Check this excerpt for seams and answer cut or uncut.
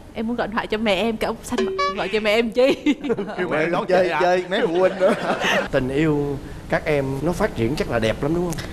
cut